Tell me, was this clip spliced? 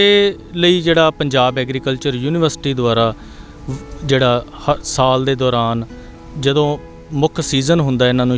no; 0 cuts

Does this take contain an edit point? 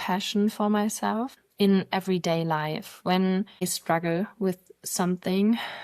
yes; 2 cuts; at 1.4 s, 3.6 s

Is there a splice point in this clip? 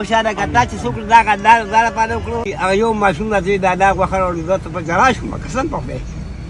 yes; 1 cut; at 2.8 s

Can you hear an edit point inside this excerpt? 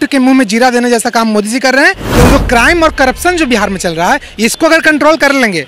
yes; 1 cut; at 2.0 s

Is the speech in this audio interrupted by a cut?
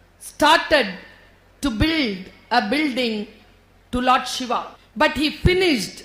yes; 1 cut; at 4.8 s

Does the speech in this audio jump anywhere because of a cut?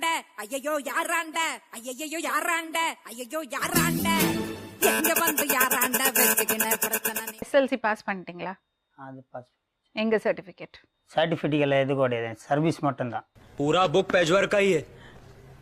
no; 0 cuts

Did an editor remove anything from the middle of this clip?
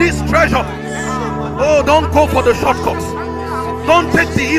no; 0 cuts

